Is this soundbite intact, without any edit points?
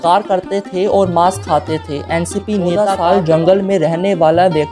no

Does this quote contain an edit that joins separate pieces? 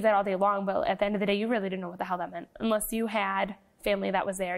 no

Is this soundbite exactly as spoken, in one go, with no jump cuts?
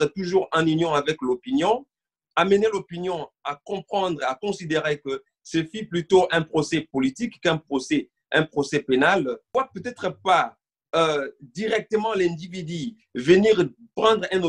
no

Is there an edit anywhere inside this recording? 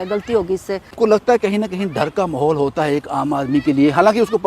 yes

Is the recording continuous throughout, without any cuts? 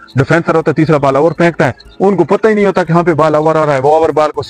yes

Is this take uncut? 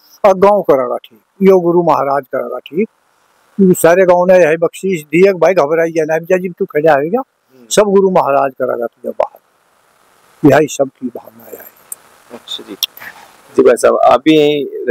yes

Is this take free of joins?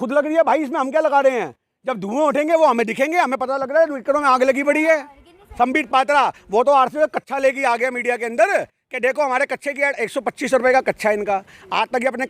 no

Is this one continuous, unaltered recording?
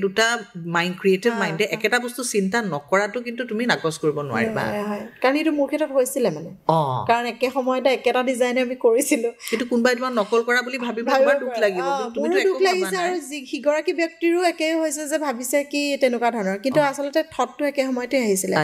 yes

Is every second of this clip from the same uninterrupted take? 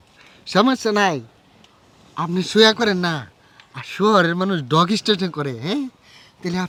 yes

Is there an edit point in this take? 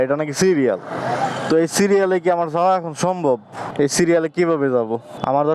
no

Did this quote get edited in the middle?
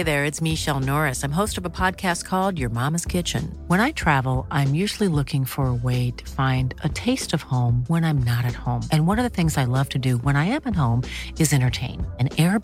no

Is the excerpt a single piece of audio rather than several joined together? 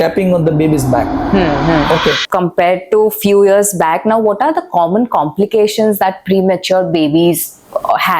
no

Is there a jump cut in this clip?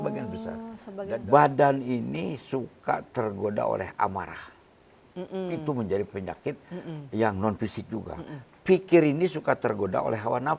yes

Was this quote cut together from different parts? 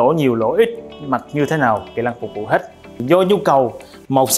yes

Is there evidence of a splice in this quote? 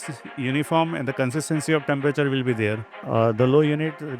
yes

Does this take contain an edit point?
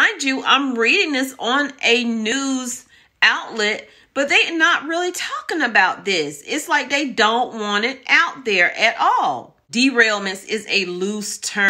yes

